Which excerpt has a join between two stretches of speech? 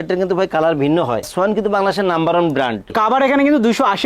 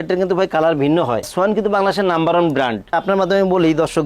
first; 1 cut; at 2.9 s

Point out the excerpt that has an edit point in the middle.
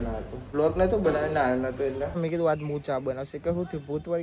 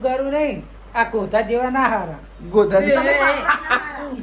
first; 1 cut; at 2.1 s

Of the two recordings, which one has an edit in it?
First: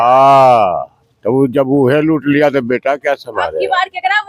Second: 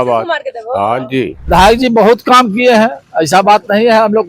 second; 1 cut; at 1.5 s

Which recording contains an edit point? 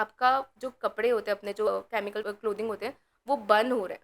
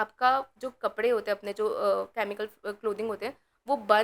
first; 1 cut; at 1.8 s

